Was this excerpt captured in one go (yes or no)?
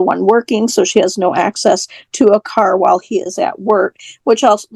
yes